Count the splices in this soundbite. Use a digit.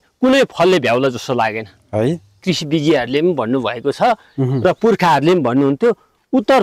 1